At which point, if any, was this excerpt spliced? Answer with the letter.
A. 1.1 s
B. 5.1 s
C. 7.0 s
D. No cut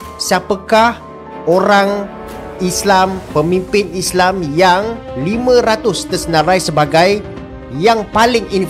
D